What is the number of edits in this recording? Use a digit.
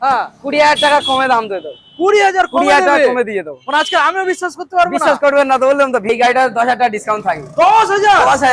1